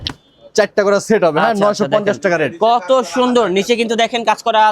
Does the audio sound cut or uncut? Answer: uncut